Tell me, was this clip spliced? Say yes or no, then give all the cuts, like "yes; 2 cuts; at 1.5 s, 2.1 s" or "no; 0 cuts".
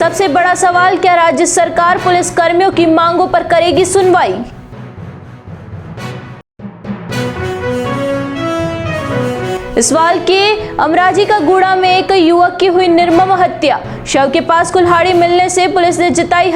no; 0 cuts